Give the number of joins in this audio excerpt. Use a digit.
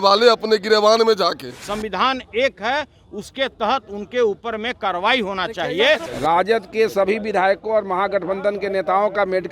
2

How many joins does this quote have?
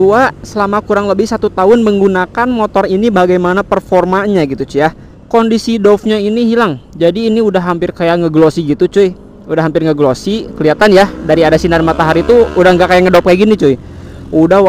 1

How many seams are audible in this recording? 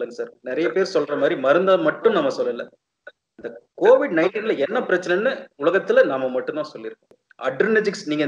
1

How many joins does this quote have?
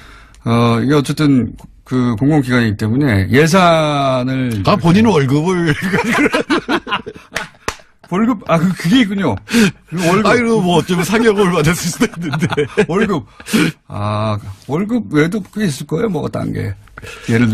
1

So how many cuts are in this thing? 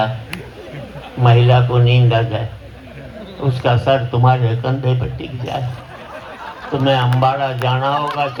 0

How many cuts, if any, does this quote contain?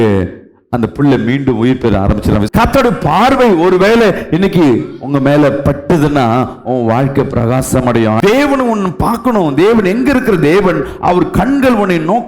2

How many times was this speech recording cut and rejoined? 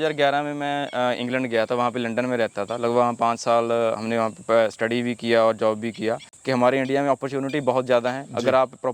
1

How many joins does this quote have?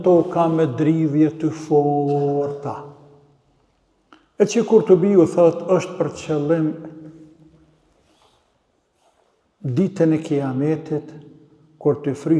0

